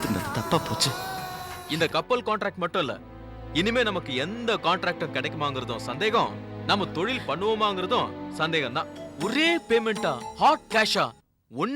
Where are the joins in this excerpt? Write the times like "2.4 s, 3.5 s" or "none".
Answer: 1.5 s, 9.0 s